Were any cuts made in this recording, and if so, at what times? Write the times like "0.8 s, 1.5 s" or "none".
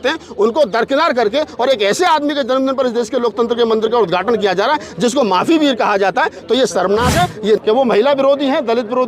7.6 s